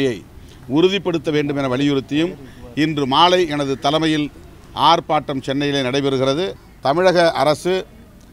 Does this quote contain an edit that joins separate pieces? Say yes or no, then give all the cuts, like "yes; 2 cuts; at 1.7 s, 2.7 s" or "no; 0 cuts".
yes; 1 cut; at 6.6 s